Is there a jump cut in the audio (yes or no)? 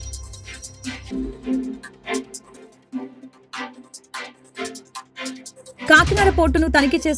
yes